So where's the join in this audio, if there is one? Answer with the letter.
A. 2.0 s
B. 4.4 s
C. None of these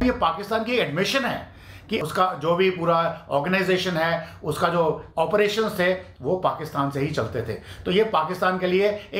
A